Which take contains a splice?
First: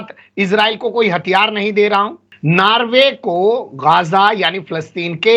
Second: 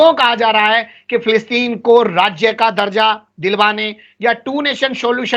first; 1 cut; at 2.3 s

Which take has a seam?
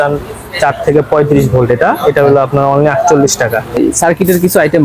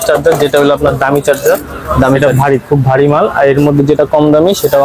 first; 1 cut; at 3.8 s

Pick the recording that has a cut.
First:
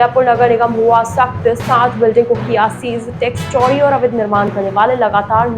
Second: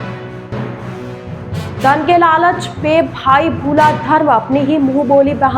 second; 1 cut; at 1.3 s

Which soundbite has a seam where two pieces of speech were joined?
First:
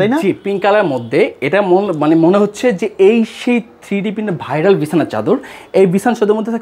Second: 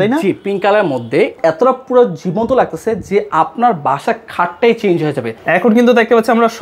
second; 2 cuts; at 1.4 s, 5.3 s

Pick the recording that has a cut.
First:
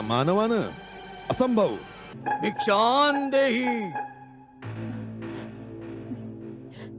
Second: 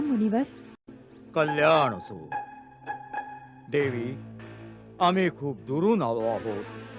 first; 1 cut; at 2.1 s

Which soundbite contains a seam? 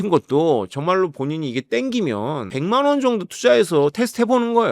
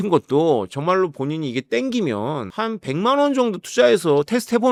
first; 1 cut; at 2.5 s

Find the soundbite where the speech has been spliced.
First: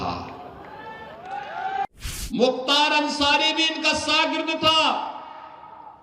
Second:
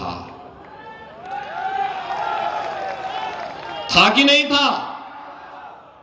first; 1 cut; at 1.8 s

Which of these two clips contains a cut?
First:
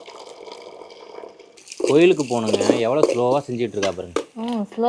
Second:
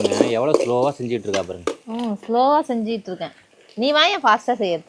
first; 1 cut; at 1.6 s

